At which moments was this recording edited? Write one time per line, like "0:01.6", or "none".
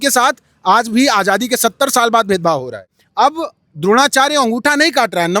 0:03.0

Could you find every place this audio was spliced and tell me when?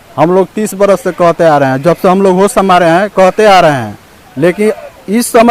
none

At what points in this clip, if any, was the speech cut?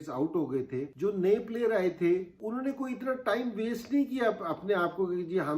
0:00.9
0:02.3

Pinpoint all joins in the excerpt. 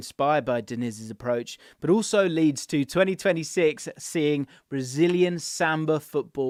none

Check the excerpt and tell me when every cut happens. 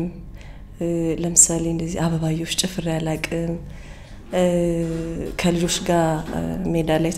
none

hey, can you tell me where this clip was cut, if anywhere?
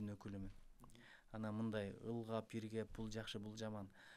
none

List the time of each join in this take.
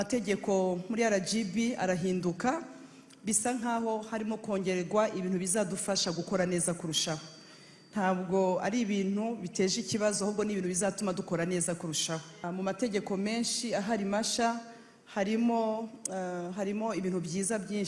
0:12.4

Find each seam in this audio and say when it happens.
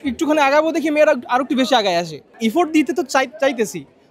0:02.3

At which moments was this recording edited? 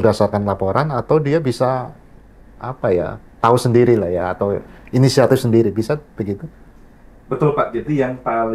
none

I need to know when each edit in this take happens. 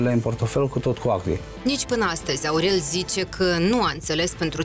0:01.5

